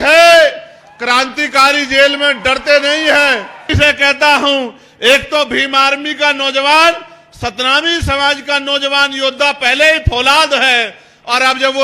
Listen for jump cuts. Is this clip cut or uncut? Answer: cut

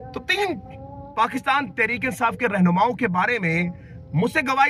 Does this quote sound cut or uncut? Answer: uncut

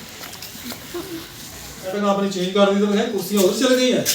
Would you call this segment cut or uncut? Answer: cut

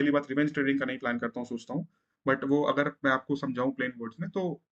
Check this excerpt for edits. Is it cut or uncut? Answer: uncut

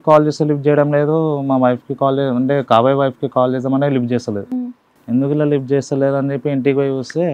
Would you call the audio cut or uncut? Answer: uncut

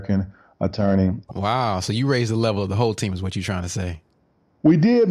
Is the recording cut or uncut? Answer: cut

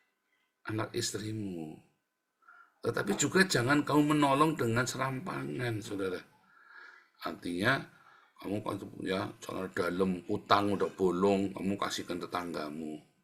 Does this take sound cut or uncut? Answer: uncut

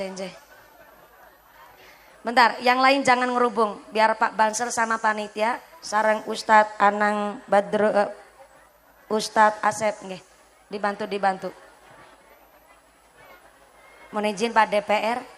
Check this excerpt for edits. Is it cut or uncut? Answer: cut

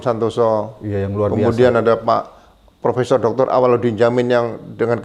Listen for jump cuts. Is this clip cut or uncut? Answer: uncut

